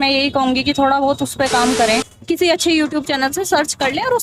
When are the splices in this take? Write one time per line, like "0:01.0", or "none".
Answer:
0:02.2